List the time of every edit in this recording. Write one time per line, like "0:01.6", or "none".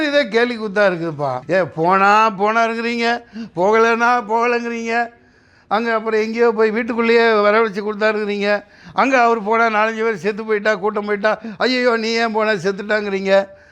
0:01.4